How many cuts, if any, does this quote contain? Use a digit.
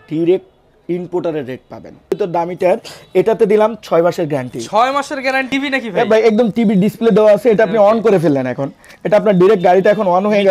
2